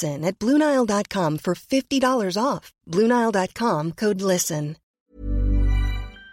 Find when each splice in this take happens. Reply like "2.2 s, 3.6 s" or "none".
4.9 s